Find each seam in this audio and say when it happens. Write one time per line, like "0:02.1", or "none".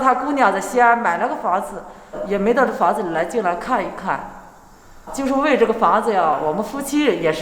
0:02.2
0:05.1
0:06.4